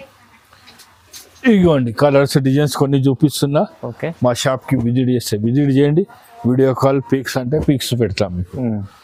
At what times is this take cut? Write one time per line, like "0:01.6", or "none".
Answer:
none